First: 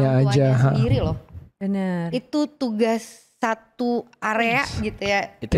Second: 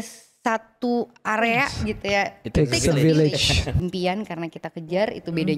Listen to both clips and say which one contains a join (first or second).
second